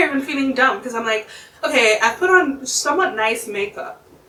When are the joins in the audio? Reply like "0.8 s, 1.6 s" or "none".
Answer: none